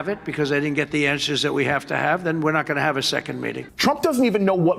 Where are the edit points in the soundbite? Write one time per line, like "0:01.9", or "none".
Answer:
0:03.6